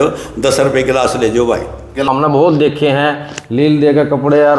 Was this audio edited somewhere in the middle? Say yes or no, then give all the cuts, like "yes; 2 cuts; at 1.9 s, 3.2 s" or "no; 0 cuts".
yes; 1 cut; at 2.1 s